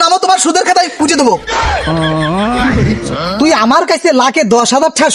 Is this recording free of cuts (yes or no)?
no